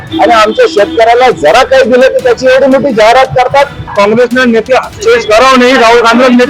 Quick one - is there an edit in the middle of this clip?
yes; 1 cut; at 3.9 s

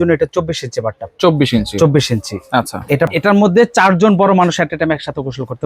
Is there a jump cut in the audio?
yes; 1 cut; at 3.1 s

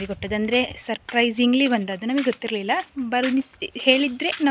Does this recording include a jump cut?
no; 0 cuts

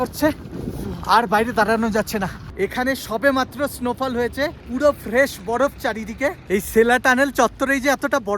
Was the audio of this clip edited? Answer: yes; 1 cut; at 2.5 s

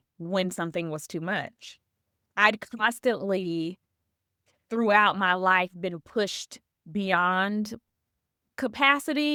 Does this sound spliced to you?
no; 0 cuts

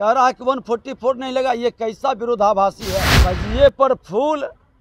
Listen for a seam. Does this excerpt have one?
yes; 1 cut; at 3.1 s

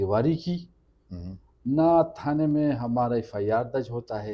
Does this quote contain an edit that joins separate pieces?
no; 0 cuts

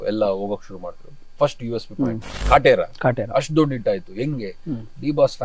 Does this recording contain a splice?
yes; 1 cut; at 2.3 s

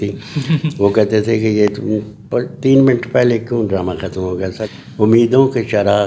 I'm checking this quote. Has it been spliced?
yes; 1 cut; at 4.6 s

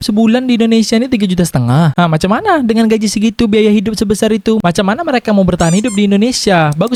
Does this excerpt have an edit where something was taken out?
no; 0 cuts

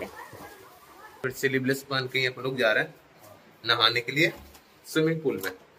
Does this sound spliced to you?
yes; 1 cut; at 1.2 s

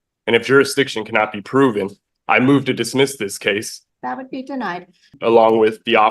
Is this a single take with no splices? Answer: no; 2 cuts; at 3.8 s, 5.1 s

